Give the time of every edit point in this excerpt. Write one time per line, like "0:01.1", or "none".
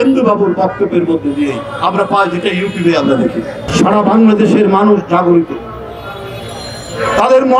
0:03.6